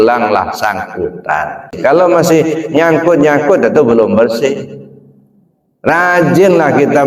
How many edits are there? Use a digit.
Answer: 1